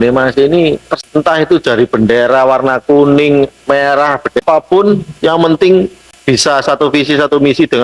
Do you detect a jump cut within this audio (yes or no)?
yes